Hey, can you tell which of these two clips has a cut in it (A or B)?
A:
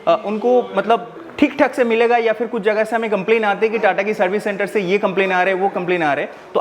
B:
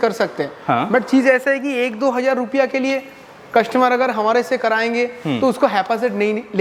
A